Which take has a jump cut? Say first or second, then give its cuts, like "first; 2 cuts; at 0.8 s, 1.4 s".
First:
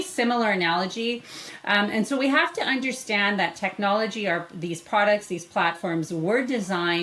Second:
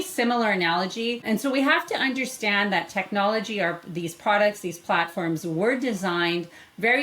second; 1 cut; at 1.2 s